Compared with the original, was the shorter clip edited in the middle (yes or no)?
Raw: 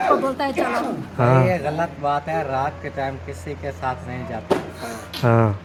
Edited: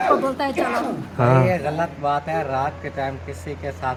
no